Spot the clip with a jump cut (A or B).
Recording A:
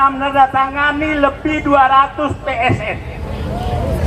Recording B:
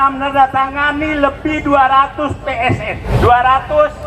B